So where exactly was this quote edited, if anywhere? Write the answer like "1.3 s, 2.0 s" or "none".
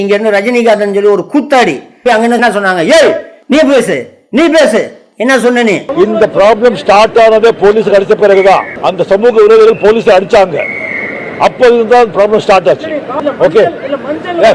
none